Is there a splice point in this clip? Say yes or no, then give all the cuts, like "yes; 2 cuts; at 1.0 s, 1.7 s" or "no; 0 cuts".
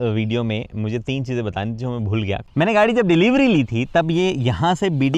yes; 1 cut; at 2.4 s